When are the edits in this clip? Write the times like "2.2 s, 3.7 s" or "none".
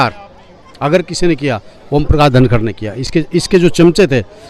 none